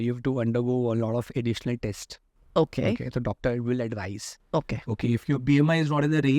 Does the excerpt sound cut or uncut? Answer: uncut